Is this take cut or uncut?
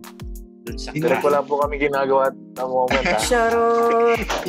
uncut